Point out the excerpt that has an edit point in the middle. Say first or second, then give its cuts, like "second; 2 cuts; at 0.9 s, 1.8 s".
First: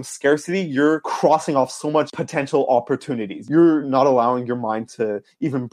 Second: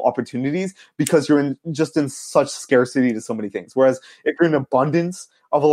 first; 3 cuts; at 1.1 s, 2.2 s, 3.3 s